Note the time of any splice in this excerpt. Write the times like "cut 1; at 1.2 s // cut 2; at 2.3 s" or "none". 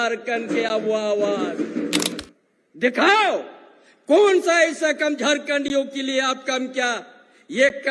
cut 1; at 2.2 s